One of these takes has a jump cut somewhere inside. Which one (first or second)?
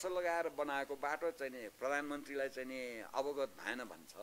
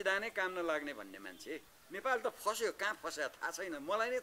second